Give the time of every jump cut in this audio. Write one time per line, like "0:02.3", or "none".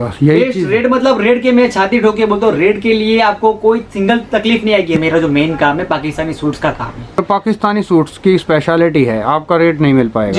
0:05.0
0:07.2